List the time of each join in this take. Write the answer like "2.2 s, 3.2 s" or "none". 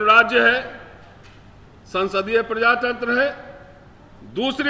none